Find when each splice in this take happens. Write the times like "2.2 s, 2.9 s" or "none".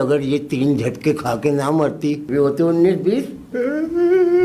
2.2 s, 3.5 s